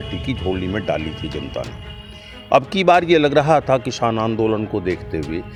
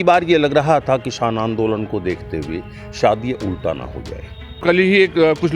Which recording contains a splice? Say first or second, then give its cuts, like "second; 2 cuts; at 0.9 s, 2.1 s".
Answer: second; 1 cut; at 4.6 s